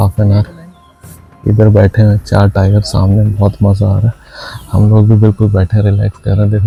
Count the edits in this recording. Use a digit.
0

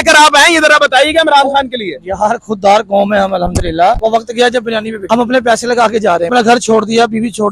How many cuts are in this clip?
3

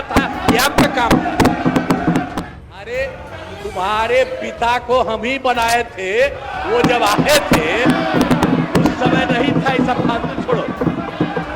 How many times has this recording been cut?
1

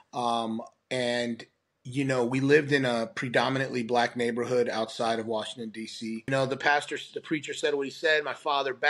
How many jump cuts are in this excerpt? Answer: 1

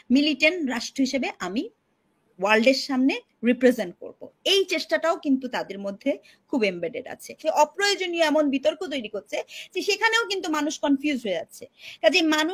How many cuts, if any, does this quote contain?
1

